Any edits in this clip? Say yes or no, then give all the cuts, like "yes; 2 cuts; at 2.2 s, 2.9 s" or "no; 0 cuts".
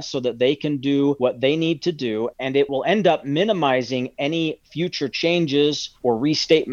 no; 0 cuts